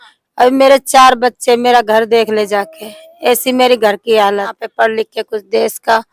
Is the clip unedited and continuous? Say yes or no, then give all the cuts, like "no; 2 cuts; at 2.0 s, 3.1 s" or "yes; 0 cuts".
no; 1 cut; at 4.6 s